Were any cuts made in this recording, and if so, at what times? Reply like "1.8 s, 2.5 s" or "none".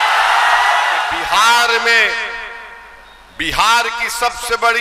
1.2 s